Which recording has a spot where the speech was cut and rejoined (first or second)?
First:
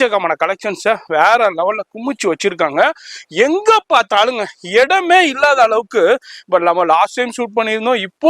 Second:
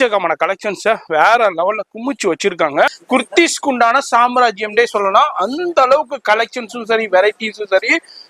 second